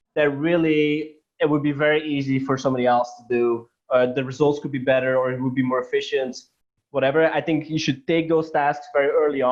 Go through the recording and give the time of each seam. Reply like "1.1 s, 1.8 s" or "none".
none